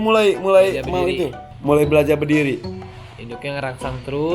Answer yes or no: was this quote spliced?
yes